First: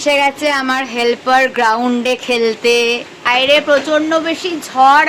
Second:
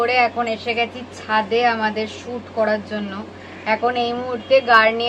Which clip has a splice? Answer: first; 1 cut; at 3.3 s

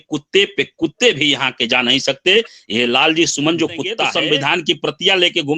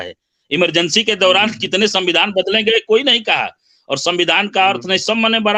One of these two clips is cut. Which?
first; 1 cut; at 4.1 s

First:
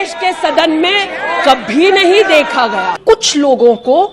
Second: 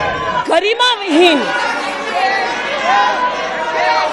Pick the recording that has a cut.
first; 1 cut; at 3.0 s

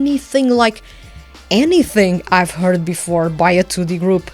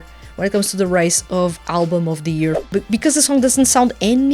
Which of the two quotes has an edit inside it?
second; 1 cut; at 2.6 s

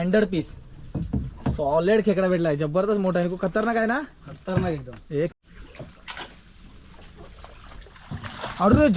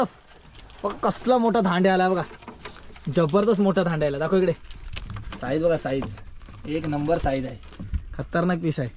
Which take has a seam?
first; 1 cut; at 5.3 s

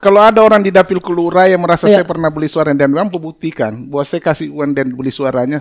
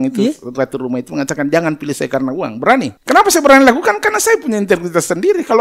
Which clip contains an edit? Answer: second; 1 cut; at 3.0 s

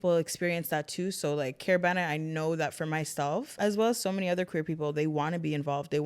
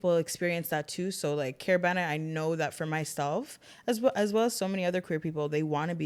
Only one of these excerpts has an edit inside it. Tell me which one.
first; 1 cut; at 3.6 s

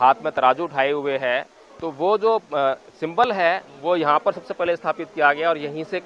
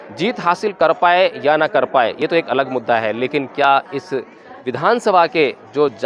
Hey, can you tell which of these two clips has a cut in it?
second; 1 cut; at 4.6 s

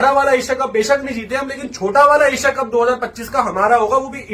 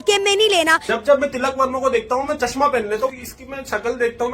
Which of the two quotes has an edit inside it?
second; 2 cuts; at 1.1 s, 3.2 s

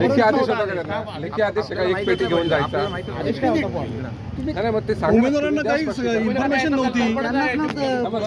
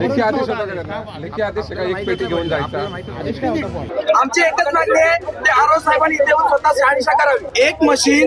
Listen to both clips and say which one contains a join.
second; 2 cuts; at 3.8 s, 7.5 s

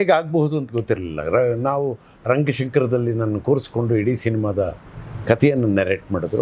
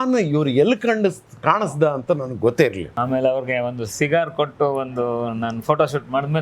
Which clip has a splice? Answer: second; 1 cut; at 2.9 s

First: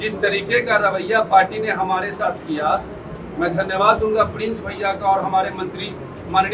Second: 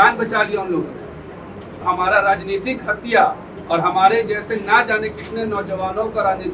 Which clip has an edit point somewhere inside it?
second; 1 cut; at 1.8 s

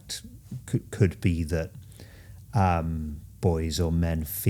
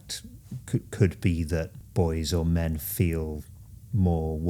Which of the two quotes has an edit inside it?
second; 1 cut; at 1.8 s

